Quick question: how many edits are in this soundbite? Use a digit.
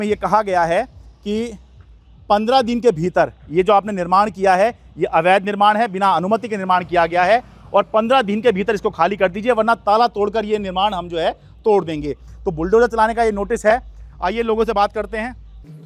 0